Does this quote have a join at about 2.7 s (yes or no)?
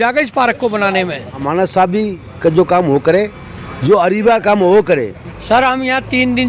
no